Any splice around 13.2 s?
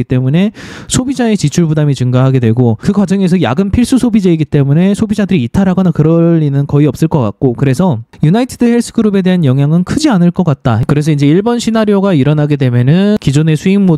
yes; 3 cuts; at 2.8 s, 10.7 s, 13.2 s

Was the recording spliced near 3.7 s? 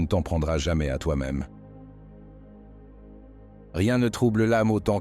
yes; 2 cuts; at 1.5 s, 3.7 s

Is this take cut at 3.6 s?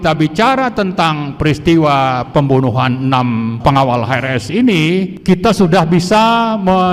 yes; 2 cuts; at 3.6 s, 5.1 s

